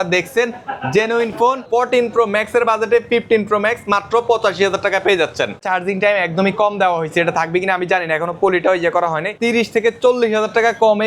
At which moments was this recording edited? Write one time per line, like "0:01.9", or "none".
0:01.6
0:05.6
0:09.3